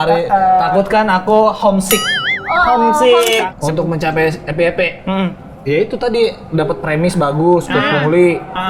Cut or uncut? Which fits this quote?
cut